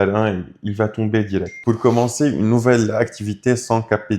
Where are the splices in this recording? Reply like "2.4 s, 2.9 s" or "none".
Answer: 1.5 s